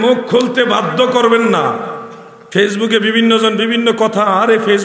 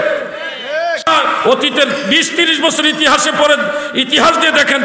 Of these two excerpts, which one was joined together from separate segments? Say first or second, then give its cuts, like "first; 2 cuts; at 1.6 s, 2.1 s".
second; 1 cut; at 1.0 s